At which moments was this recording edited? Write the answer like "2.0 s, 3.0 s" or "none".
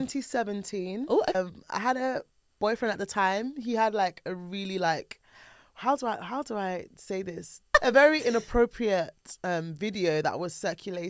1.3 s, 7.8 s